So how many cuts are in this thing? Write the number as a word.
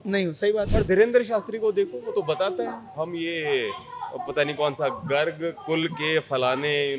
zero